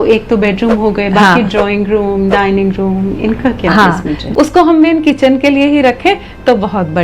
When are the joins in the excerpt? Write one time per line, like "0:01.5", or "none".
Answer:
0:04.2